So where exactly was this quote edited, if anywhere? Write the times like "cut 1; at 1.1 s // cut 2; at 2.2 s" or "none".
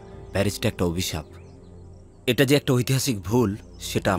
none